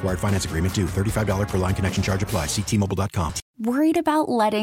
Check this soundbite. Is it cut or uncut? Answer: cut